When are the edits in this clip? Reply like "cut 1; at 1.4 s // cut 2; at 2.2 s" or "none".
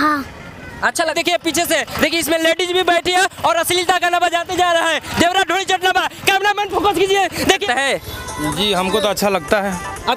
cut 1; at 1.1 s // cut 2; at 7.6 s